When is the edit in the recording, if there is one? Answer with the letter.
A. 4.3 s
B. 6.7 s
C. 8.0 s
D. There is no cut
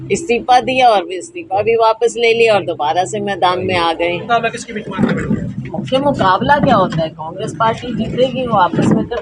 A